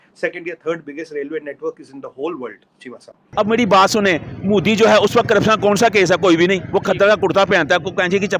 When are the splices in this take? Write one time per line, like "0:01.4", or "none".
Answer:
0:03.3

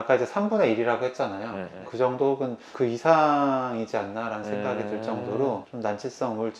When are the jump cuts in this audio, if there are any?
0:02.6
0:05.7

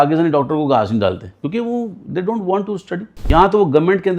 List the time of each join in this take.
0:01.3
0:03.3

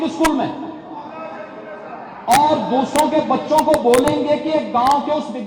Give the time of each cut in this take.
none

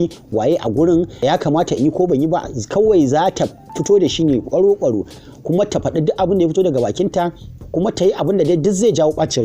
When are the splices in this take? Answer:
0:01.2
0:07.5

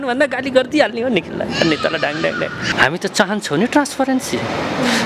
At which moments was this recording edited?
0:02.7

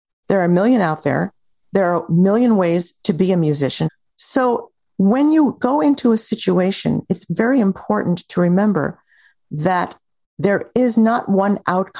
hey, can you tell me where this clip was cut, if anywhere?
0:03.9

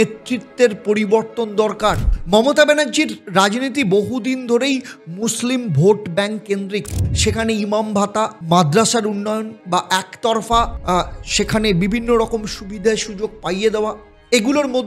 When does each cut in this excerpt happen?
0:02.0
0:09.5
0:10.8

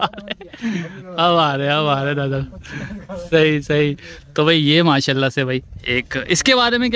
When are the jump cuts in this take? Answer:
none

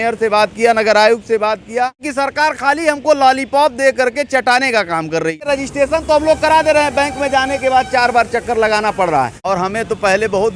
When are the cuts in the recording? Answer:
0:02.1
0:05.4
0:09.5

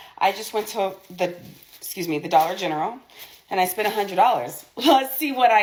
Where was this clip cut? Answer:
none

